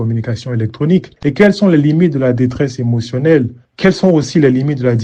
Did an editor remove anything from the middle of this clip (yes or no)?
yes